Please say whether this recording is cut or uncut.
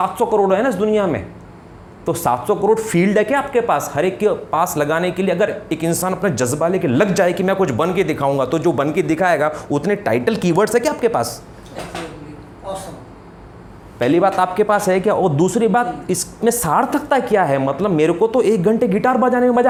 uncut